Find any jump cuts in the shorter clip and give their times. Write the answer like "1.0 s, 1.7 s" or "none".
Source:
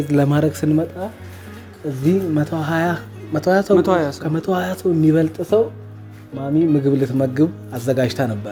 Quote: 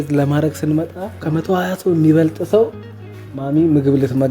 1.2 s

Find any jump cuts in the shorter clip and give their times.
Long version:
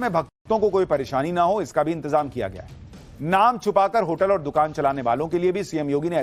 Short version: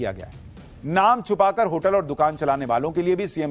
none

